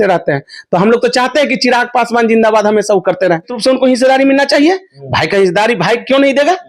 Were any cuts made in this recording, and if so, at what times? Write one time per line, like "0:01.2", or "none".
0:03.5